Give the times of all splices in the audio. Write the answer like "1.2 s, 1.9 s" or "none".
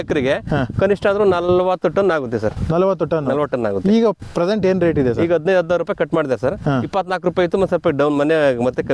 none